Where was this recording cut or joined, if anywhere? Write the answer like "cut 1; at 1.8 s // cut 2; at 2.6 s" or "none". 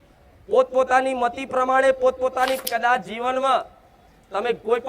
cut 1; at 2.7 s